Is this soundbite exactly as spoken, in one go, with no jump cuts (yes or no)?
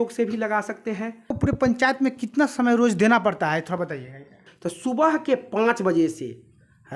no